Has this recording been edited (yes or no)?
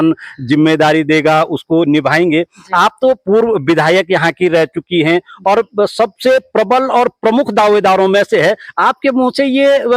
no